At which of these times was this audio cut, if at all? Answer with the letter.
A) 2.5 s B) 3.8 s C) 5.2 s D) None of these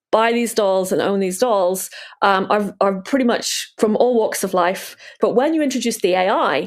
C